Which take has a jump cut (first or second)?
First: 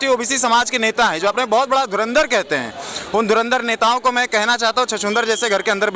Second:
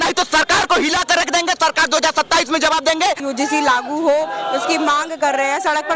second